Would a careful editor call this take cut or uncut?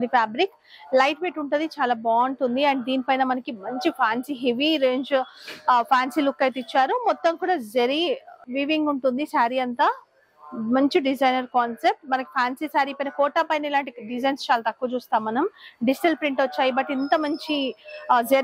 uncut